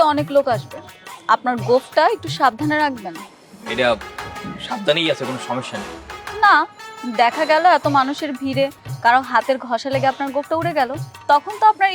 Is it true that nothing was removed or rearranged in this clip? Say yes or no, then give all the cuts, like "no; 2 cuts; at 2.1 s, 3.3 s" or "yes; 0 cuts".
yes; 0 cuts